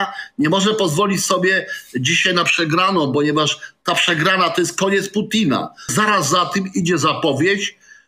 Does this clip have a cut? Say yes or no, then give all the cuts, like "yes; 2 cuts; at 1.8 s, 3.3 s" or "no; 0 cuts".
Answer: yes; 1 cut; at 5.9 s